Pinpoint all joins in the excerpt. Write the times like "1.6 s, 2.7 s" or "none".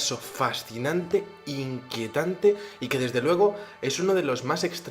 3.6 s